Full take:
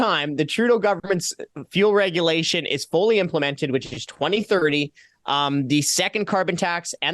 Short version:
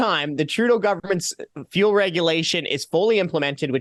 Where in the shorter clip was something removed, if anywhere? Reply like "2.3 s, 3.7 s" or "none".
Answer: none